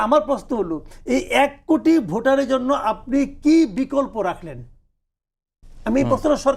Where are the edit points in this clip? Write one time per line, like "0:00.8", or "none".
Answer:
none